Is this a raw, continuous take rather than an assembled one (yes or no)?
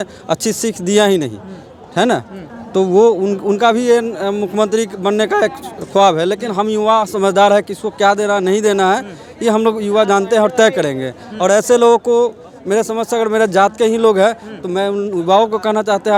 yes